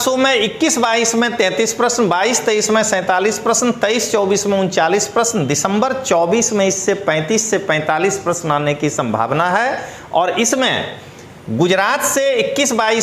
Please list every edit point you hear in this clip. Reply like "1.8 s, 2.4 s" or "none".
none